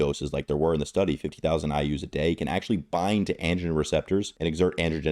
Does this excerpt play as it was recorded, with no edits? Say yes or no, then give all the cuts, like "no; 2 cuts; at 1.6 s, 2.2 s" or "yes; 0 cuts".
yes; 0 cuts